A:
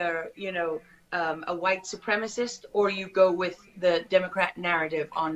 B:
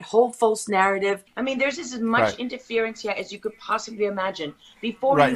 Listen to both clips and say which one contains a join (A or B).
B